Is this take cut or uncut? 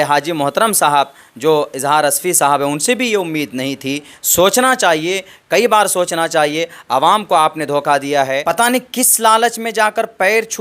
cut